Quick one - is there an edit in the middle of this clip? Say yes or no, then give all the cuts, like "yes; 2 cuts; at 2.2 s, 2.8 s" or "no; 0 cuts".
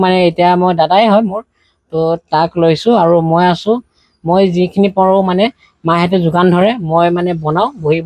no; 0 cuts